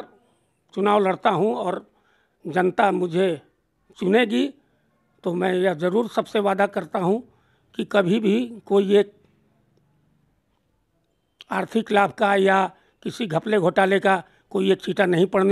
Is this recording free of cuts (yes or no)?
yes